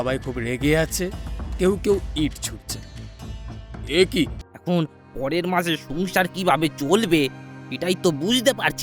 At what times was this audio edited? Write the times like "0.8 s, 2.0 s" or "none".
4.5 s